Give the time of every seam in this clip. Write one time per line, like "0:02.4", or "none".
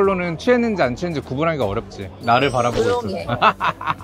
none

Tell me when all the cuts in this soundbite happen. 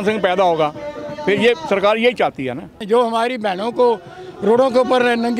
0:02.8

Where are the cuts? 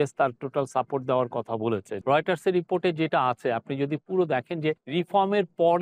0:01.9
0:04.8

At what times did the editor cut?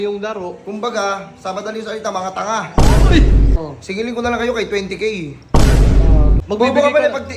0:03.5
0:06.4

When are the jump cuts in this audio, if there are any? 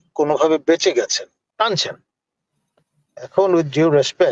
0:01.4

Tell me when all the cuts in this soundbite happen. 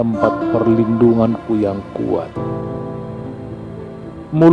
none

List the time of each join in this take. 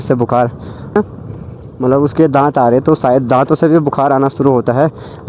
0:01.0

